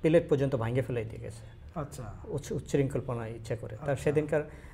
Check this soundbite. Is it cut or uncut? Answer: uncut